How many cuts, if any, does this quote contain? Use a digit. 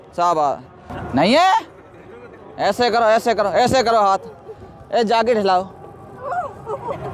1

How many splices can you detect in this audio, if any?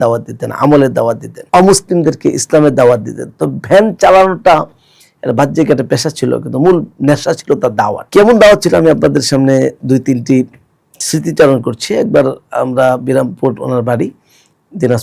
0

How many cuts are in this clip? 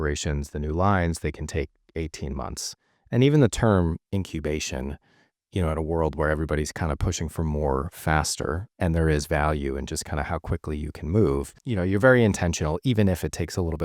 1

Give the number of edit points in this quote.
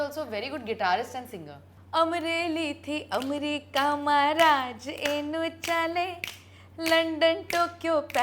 1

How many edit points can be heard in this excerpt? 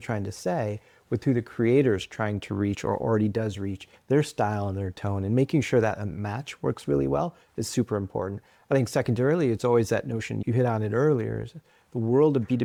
0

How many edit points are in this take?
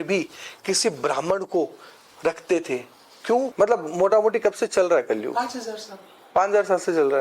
1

